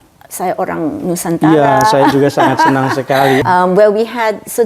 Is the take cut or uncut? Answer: cut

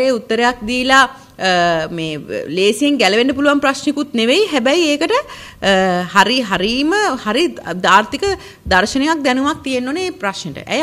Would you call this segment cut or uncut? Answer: uncut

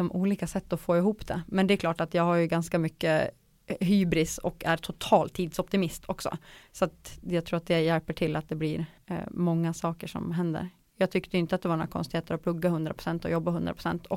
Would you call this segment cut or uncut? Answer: cut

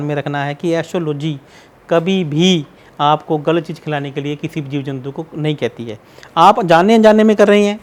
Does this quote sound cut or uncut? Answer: uncut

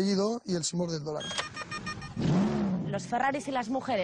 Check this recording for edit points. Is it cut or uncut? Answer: cut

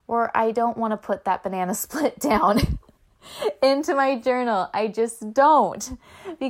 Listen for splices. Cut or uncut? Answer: uncut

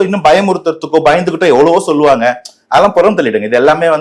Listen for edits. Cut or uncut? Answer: uncut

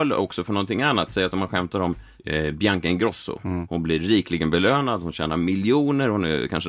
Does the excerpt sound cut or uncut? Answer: cut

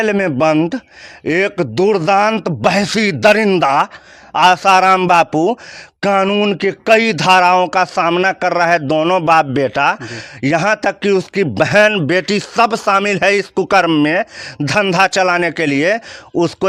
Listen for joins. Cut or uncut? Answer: uncut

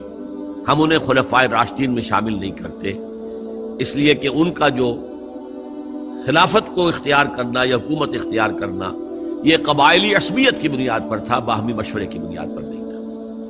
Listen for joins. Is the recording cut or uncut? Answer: cut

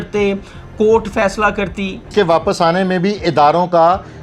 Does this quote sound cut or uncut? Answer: cut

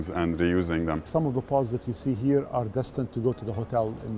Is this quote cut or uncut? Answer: cut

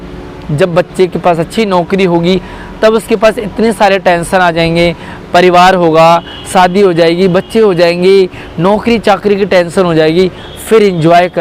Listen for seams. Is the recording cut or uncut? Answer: uncut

